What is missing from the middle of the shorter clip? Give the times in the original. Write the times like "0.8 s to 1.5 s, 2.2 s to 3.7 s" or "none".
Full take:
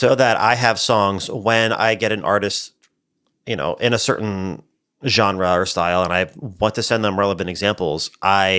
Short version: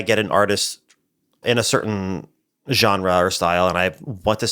3.3 s to 3.8 s